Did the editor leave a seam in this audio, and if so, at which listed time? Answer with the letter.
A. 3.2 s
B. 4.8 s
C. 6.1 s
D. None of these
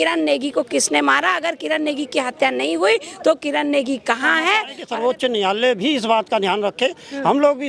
B